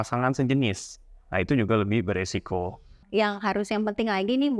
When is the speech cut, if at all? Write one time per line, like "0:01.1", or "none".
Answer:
0:03.0